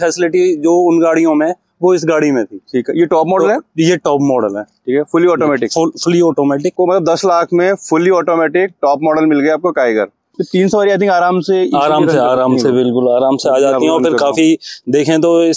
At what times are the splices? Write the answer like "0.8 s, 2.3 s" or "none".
6.7 s, 10.4 s